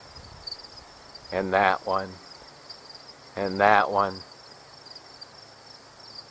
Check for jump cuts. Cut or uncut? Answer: cut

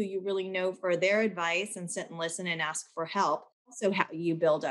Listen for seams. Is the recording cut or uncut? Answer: uncut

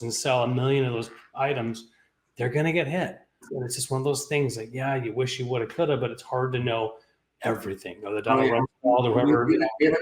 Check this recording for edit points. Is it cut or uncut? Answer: cut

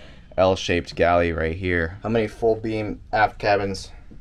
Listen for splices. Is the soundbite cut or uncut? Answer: cut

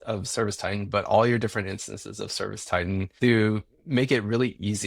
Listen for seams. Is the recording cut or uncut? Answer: cut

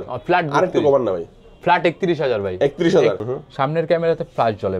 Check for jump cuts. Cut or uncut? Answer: cut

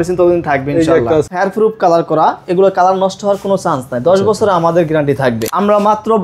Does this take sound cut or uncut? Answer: cut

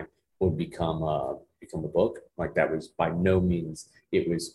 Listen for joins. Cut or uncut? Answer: uncut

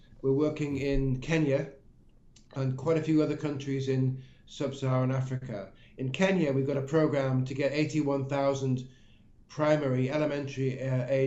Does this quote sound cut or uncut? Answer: uncut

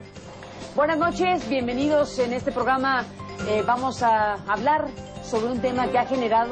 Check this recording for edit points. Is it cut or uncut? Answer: uncut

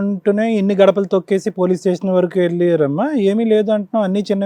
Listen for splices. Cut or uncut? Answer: uncut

